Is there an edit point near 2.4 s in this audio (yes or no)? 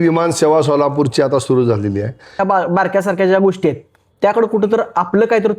yes